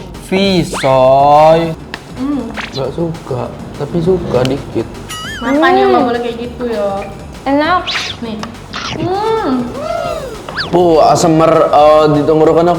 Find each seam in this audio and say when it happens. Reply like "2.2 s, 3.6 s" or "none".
1.7 s